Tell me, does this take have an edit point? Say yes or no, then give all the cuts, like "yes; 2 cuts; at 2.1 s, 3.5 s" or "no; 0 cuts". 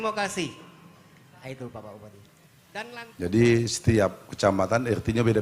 yes; 1 cut; at 2.9 s